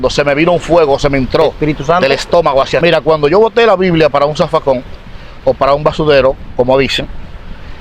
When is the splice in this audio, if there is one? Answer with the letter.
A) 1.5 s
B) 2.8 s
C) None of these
B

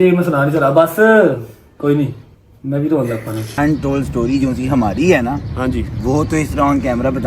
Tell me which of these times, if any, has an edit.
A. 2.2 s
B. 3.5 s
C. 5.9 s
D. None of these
B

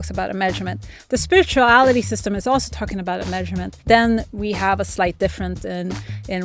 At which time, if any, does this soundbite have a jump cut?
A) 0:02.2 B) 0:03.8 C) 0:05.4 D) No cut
B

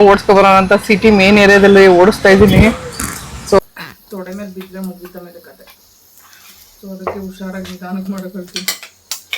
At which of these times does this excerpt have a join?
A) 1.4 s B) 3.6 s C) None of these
B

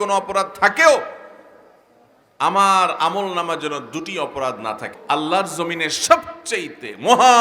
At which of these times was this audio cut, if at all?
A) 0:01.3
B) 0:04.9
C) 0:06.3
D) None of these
B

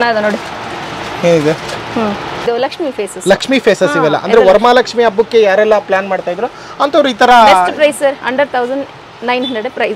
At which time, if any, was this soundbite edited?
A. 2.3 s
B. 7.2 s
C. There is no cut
A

